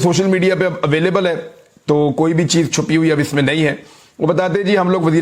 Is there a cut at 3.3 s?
yes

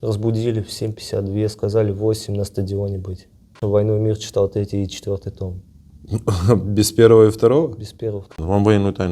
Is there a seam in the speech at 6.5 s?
no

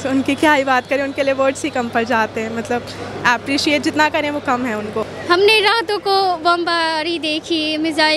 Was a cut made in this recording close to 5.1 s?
yes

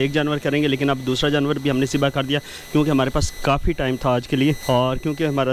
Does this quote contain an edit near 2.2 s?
no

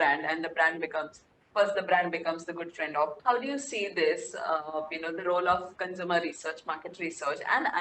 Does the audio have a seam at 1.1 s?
no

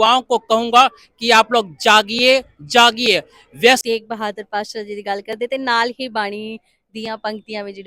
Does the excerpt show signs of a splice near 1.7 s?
no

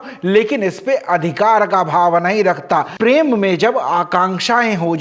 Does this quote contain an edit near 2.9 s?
yes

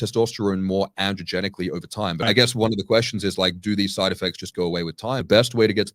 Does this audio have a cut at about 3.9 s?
no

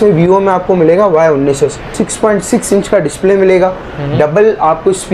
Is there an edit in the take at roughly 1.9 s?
yes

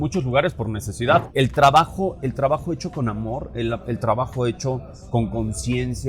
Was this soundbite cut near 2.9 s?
no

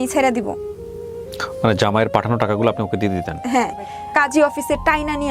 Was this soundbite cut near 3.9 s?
yes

